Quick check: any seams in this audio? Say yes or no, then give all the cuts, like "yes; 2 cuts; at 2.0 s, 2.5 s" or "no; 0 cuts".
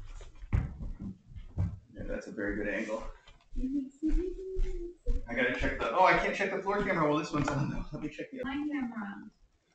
yes; 1 cut; at 8.4 s